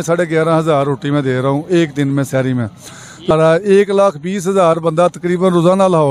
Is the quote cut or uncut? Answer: cut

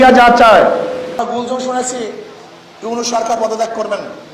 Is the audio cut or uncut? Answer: cut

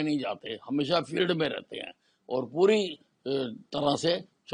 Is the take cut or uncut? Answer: uncut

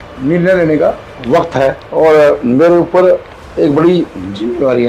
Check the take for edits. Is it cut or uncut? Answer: cut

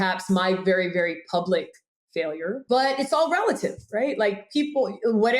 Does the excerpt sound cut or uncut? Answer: cut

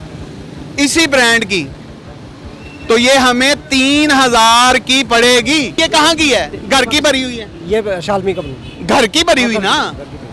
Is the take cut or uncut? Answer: cut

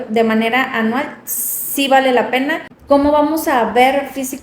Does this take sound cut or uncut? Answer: cut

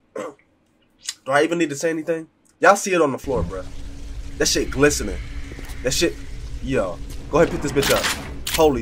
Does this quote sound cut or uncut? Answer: uncut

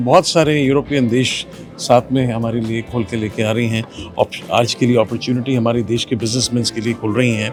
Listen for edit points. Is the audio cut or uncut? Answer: uncut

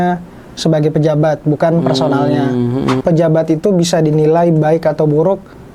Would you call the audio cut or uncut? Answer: cut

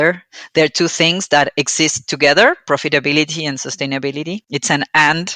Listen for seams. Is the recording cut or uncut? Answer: cut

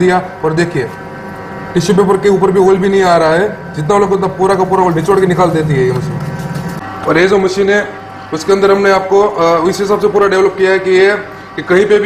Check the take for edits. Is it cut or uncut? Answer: uncut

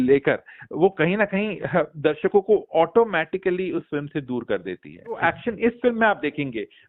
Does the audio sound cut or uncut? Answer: cut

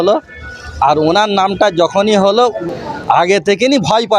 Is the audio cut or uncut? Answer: cut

